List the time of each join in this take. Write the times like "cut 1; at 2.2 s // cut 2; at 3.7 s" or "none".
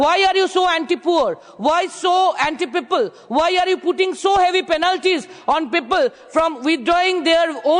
none